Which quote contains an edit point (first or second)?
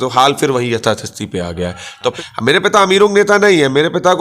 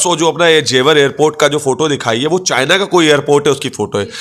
first